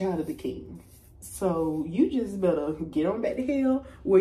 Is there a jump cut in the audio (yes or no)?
no